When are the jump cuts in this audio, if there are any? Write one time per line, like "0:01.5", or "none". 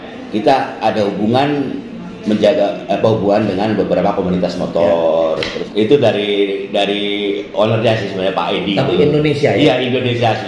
0:05.6